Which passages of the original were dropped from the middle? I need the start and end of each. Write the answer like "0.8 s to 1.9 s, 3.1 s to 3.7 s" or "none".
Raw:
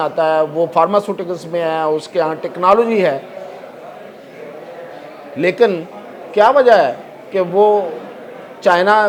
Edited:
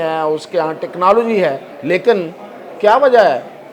3.3 s to 5.2 s